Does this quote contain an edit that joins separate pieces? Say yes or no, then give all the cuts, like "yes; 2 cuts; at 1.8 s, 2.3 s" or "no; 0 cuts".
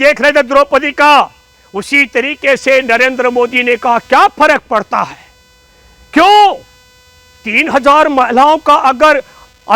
no; 0 cuts